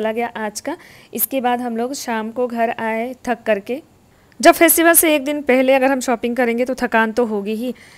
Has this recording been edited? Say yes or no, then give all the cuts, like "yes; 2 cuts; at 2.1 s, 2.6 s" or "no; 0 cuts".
no; 0 cuts